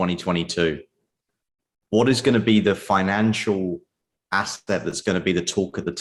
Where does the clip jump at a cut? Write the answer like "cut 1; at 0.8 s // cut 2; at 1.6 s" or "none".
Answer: none